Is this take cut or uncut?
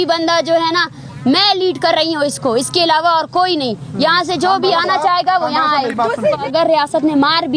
cut